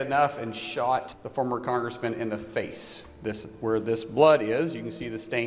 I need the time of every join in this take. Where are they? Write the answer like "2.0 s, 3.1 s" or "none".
1.2 s